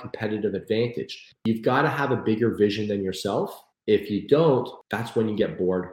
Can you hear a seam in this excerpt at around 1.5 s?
yes; 3 cuts; at 1.5 s, 3.6 s, 4.8 s

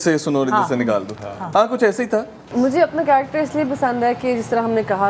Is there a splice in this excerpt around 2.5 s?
yes; 1 cut; at 2.5 s

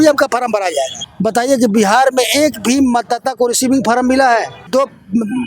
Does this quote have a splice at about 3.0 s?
no; 2 cuts; at 1.0 s, 4.6 s

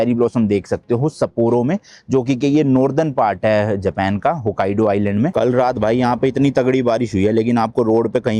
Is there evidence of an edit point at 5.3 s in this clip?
yes; 1 cut; at 5.3 s

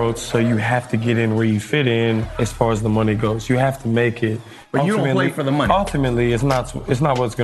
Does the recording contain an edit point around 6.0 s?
no; 2 cuts; at 2.3 s, 4.5 s

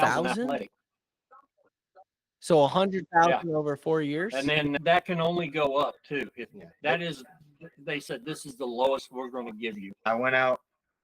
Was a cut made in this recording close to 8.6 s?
no; 2 cuts; at 4.8 s, 10.0 s

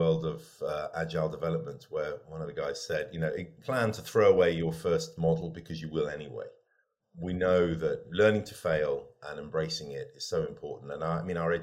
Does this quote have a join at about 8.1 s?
yes; 3 cuts; at 3.6 s, 7.0 s, 8.1 s

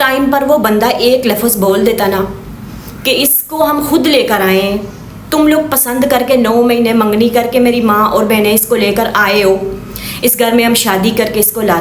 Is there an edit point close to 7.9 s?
no; 0 cuts

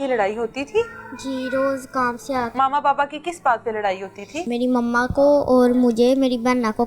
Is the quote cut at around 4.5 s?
yes; 2 cuts; at 2.5 s, 4.5 s

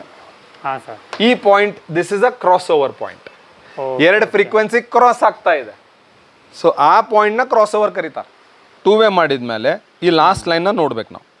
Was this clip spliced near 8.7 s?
yes; 1 cut; at 8.7 s

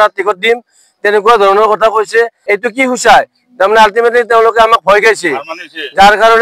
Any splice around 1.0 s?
no; 1 cut; at 2.4 s

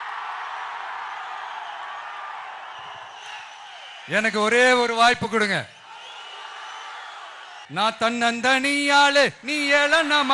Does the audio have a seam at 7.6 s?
yes; 1 cut; at 7.6 s

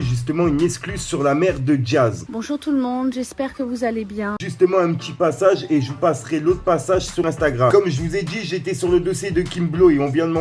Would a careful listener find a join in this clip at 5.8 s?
no; 3 cuts; at 2.2 s, 4.4 s, 7.6 s

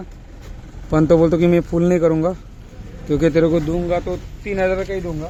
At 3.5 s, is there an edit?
no; 0 cuts

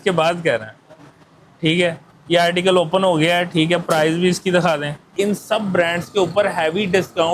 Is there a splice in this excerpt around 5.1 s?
yes; 1 cut; at 5.1 s

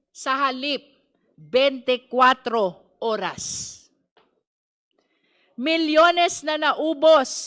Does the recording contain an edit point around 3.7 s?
no; 0 cuts

